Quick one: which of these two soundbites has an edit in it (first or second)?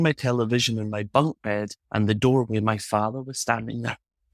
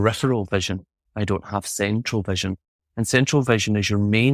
first